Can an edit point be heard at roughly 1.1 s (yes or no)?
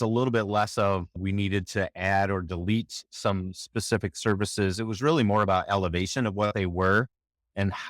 yes